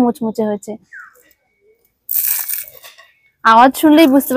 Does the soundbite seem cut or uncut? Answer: uncut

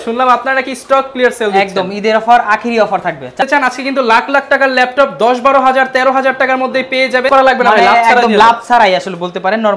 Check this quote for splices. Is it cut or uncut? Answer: cut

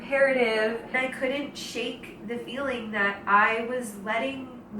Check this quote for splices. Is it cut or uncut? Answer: cut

